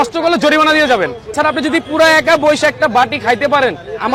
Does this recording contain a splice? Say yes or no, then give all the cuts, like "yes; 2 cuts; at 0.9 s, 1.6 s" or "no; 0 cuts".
no; 0 cuts